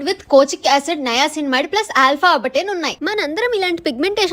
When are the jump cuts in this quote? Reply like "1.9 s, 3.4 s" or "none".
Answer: 2.9 s